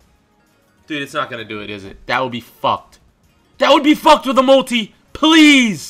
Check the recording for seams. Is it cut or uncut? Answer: uncut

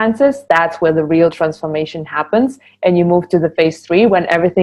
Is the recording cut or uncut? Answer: uncut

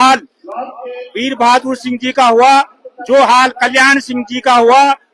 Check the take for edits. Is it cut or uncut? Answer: uncut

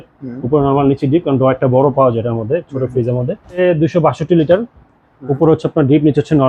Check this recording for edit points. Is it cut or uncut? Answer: cut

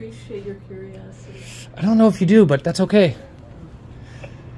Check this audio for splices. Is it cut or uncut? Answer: uncut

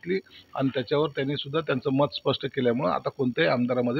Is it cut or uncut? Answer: uncut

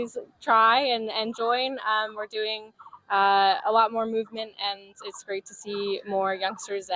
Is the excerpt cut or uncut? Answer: uncut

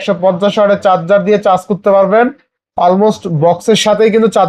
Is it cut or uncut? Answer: uncut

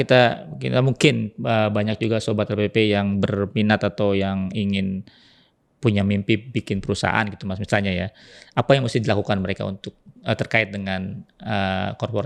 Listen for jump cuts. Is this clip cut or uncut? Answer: uncut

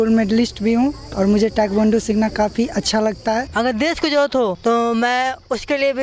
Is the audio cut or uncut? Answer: cut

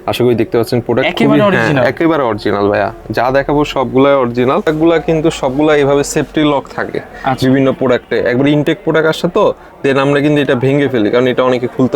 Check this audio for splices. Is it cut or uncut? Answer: cut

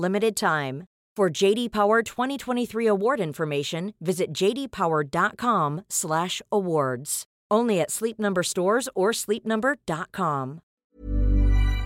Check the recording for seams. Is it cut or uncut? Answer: cut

